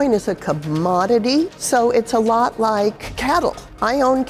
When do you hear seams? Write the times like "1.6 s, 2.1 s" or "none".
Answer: 1.6 s, 3.1 s